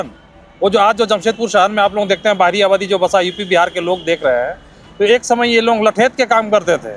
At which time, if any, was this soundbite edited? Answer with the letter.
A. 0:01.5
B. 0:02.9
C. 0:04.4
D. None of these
D